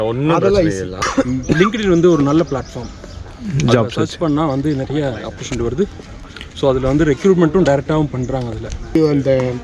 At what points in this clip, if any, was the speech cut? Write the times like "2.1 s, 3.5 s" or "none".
1.0 s, 9.0 s